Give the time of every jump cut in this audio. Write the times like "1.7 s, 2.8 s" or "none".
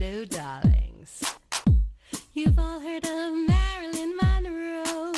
1.1 s